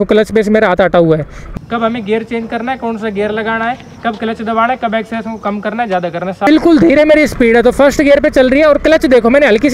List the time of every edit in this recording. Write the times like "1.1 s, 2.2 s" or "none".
1.4 s, 6.5 s